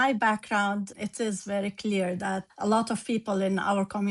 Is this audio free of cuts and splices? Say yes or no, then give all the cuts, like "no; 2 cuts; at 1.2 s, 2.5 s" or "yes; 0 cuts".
no; 2 cuts; at 0.9 s, 2.5 s